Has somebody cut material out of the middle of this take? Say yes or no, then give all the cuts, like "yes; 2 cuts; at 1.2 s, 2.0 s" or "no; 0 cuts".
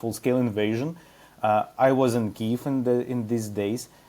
no; 0 cuts